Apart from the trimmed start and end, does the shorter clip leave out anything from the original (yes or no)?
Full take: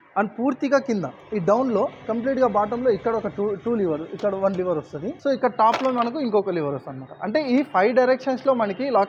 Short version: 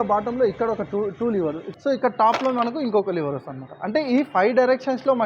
yes